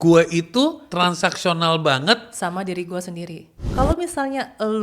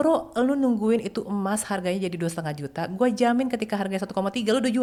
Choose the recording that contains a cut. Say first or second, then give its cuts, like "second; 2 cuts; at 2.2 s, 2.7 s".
first; 1 cut; at 3.7 s